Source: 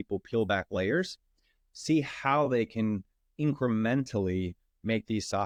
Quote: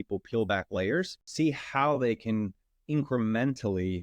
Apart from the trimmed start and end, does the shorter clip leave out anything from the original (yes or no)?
yes